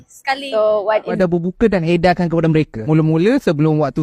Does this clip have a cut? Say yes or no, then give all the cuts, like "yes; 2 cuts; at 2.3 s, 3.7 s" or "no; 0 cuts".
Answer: yes; 1 cut; at 1.2 s